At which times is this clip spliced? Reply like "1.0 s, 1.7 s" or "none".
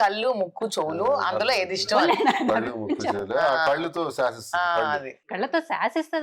5.3 s